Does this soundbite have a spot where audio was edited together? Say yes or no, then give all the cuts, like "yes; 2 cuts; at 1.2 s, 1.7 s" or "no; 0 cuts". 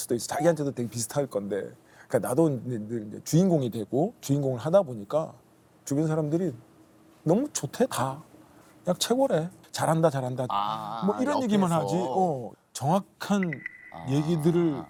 no; 0 cuts